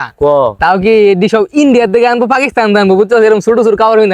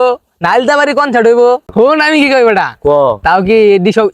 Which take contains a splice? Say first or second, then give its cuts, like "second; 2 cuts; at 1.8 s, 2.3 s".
second; 1 cut; at 1.7 s